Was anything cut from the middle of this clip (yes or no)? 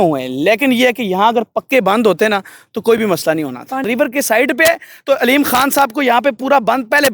yes